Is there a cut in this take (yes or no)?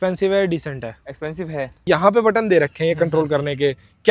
yes